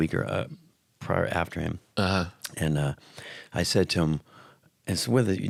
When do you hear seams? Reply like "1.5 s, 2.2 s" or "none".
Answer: none